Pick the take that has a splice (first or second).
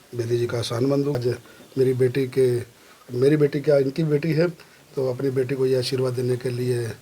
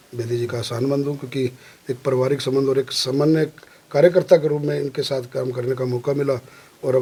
first